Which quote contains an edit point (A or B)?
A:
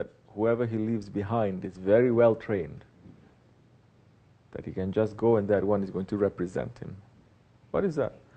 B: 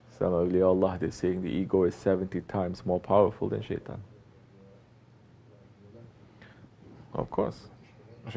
B